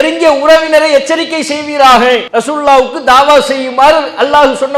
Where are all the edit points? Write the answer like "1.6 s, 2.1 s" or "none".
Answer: 2.3 s